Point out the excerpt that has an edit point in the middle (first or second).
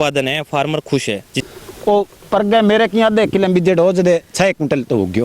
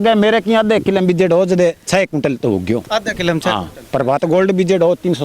first